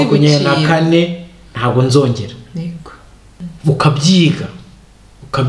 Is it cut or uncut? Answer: cut